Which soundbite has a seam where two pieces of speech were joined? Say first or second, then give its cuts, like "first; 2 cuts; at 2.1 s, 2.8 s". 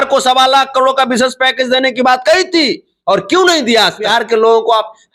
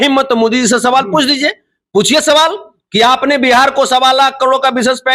first; 1 cut; at 4.1 s